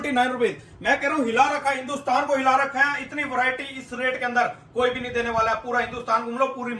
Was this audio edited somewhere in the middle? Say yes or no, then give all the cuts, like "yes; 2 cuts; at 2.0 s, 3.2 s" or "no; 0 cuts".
no; 0 cuts